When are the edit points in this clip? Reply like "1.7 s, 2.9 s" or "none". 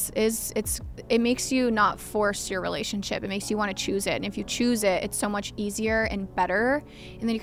none